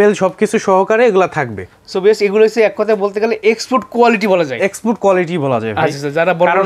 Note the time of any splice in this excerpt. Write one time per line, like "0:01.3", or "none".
none

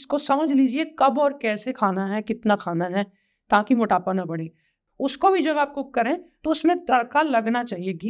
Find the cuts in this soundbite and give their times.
0:04.8

